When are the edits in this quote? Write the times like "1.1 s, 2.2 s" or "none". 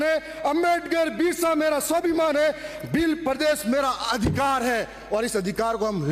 none